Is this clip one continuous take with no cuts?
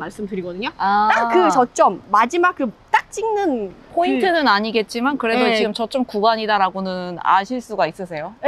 yes; 0 cuts

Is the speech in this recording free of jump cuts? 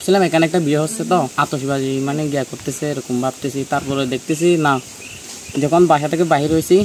no; 1 cut; at 1.4 s

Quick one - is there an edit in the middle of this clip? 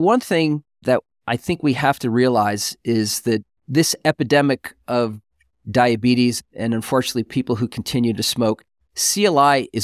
no; 0 cuts

